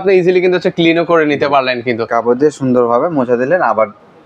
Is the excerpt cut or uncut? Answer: uncut